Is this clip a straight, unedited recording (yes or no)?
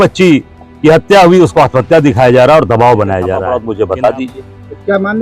no